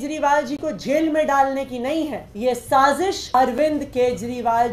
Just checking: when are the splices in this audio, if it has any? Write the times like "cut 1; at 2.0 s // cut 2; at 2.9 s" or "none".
cut 1; at 2.2 s // cut 2; at 3.3 s

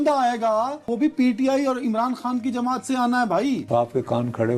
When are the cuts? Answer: cut 1; at 0.8 s // cut 2; at 3.6 s

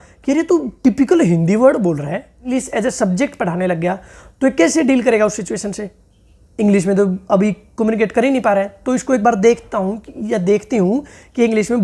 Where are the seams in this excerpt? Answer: cut 1; at 2.6 s

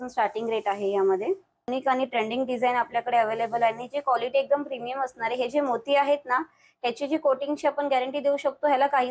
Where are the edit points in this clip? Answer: cut 1; at 1.7 s

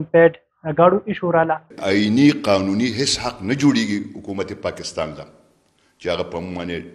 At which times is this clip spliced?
cut 1; at 1.7 s

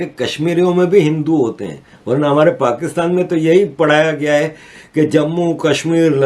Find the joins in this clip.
none

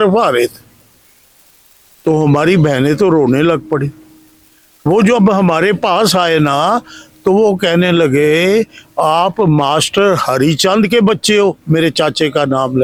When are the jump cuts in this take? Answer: none

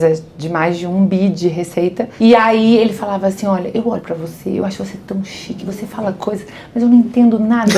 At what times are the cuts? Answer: cut 1; at 2.1 s

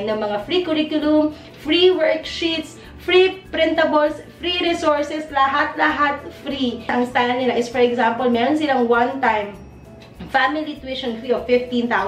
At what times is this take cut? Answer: cut 1; at 6.9 s

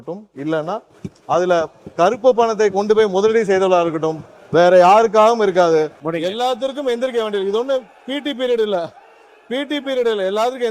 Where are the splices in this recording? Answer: cut 1; at 6.0 s

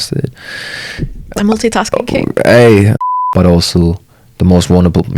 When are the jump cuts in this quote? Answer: cut 1; at 3.0 s

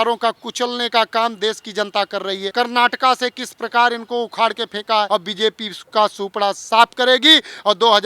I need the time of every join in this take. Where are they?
cut 1; at 2.5 s // cut 2; at 5.1 s

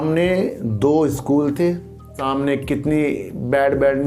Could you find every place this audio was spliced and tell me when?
cut 1; at 2.2 s

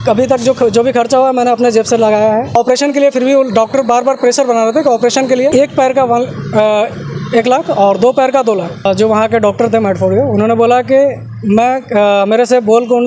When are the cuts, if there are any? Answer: cut 1; at 2.5 s // cut 2; at 5.5 s // cut 3; at 8.8 s

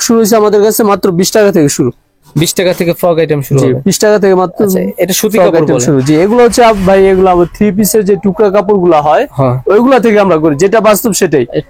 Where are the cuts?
none

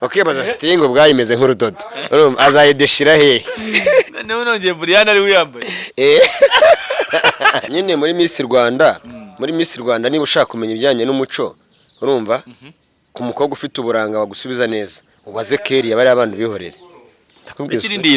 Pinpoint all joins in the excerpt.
cut 1; at 7.7 s

